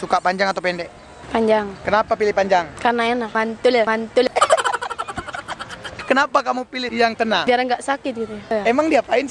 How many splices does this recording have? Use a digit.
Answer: 5